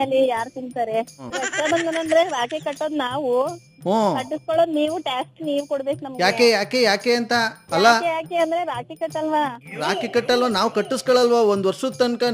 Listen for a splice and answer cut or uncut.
cut